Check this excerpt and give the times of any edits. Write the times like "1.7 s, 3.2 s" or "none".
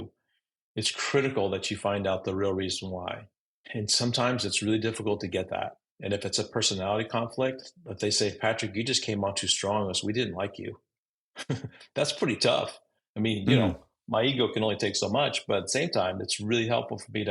none

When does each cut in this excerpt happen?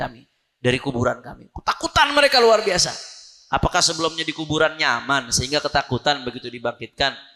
none

